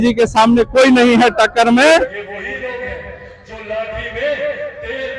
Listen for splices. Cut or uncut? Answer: cut